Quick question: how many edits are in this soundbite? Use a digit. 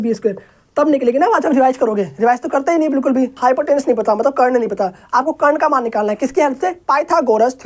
1